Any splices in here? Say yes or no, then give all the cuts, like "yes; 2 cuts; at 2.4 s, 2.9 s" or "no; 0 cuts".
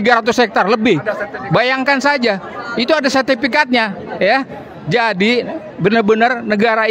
no; 0 cuts